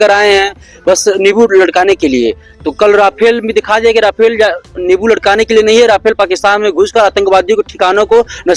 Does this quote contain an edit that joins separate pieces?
no; 0 cuts

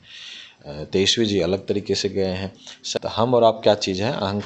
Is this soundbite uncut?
no; 1 cut; at 2.8 s

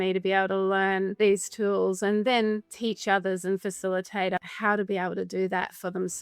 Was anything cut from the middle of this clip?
yes; 3 cuts; at 1.1 s, 2.7 s, 4.4 s

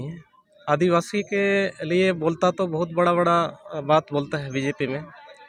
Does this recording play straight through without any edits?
yes; 0 cuts

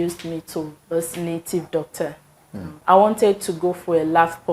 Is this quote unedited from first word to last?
no; 1 cut; at 2.7 s

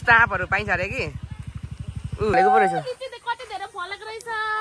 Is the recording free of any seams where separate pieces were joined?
no; 1 cut; at 2.3 s

